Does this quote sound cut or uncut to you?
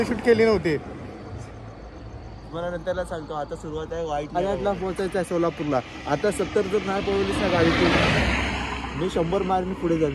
cut